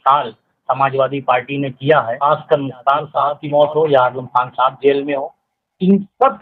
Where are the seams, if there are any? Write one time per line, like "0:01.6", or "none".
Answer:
0:02.1
0:03.4